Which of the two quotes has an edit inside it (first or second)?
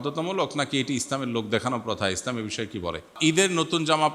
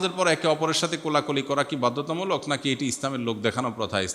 first